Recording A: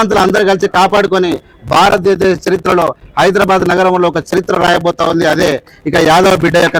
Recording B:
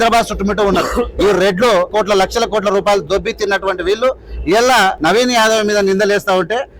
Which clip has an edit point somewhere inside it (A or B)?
B